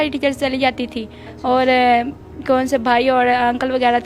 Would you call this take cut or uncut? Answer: uncut